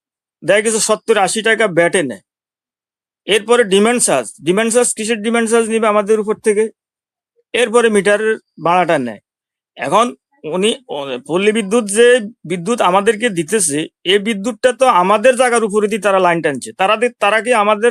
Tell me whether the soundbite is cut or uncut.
uncut